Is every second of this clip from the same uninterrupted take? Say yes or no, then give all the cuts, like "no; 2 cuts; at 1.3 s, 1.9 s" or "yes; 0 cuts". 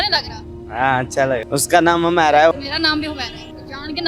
no; 2 cuts; at 1.4 s, 2.5 s